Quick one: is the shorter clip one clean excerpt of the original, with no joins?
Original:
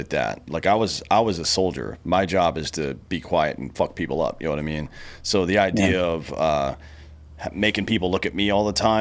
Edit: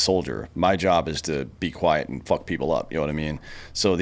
yes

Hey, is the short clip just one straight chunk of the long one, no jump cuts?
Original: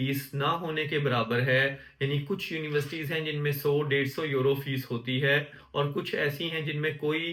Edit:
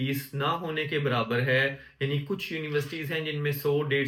yes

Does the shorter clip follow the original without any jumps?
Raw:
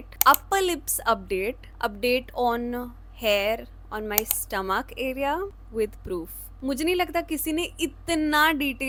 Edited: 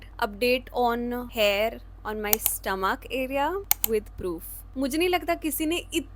no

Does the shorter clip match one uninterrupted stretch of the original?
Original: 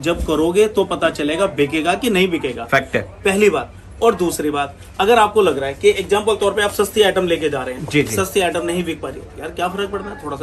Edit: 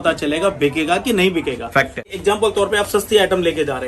no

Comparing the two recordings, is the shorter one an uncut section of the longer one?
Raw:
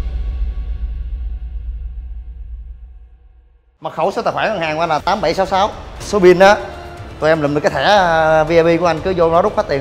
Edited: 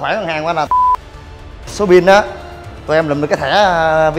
yes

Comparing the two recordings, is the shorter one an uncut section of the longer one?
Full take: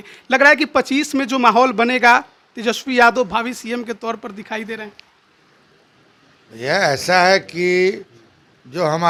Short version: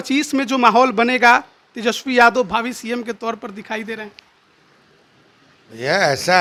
yes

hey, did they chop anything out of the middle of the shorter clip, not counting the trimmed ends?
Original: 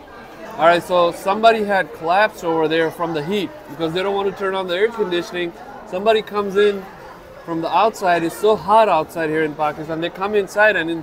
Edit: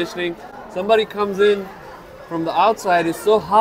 no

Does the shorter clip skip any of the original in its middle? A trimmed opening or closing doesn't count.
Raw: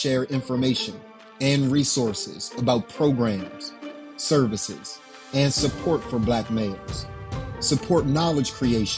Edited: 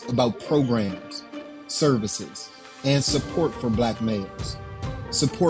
no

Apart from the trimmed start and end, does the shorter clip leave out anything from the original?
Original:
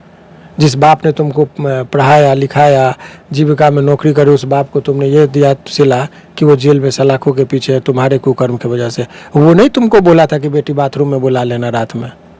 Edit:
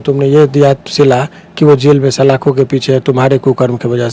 no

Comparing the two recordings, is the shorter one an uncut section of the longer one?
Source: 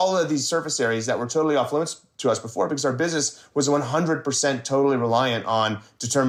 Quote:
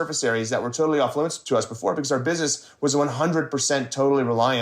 no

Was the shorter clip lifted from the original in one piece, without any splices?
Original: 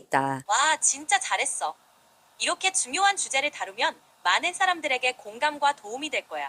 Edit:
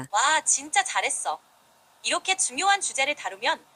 yes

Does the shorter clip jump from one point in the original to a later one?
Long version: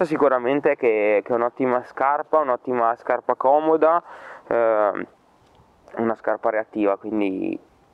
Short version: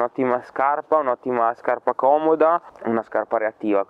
yes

